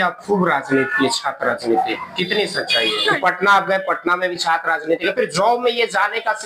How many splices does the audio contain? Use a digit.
1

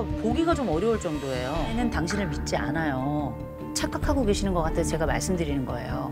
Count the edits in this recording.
1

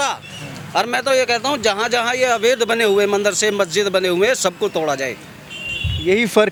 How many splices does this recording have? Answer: 0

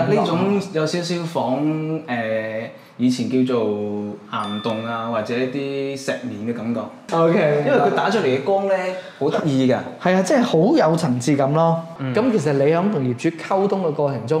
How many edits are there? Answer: 2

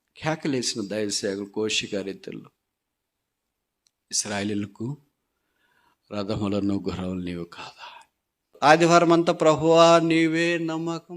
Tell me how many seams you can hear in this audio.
1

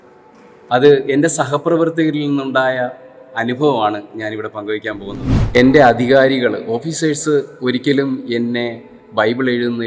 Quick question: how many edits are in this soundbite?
1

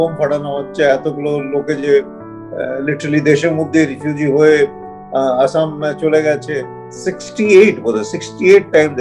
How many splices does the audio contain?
1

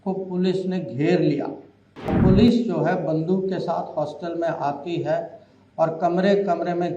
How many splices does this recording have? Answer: 1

